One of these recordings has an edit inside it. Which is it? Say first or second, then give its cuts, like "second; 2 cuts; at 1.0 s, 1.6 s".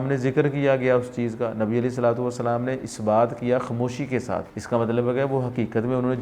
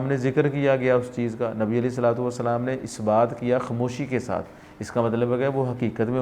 first; 1 cut; at 4.5 s